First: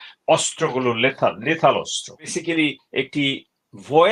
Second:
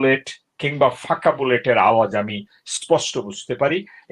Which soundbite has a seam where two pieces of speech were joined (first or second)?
first